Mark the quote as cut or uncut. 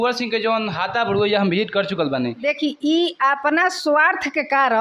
cut